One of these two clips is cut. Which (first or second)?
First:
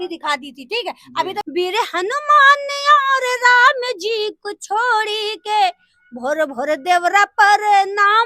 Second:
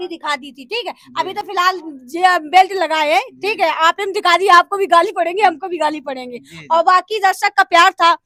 first